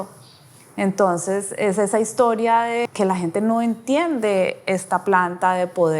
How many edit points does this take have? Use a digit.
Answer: 1